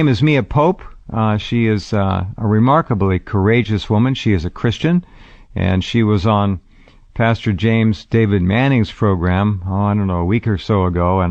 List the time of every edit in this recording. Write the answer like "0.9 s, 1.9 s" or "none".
4.0 s